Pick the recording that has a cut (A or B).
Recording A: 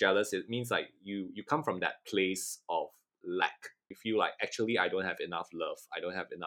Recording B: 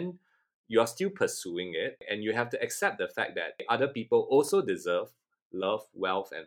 B